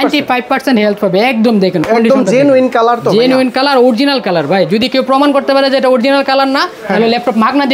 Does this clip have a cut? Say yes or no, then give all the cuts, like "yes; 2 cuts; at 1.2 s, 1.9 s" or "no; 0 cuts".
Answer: no; 0 cuts